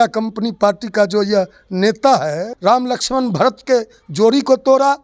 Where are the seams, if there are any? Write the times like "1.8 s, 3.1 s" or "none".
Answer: 2.5 s